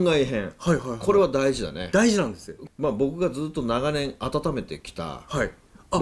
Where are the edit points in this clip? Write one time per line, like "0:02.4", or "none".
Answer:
0:02.5